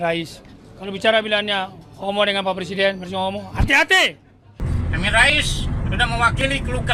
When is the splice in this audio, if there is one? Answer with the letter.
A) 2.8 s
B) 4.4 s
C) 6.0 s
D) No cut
D